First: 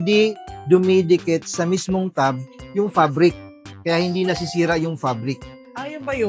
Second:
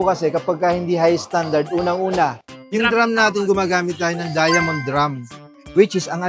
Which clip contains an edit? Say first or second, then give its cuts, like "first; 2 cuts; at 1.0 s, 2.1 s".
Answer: second; 1 cut; at 2.4 s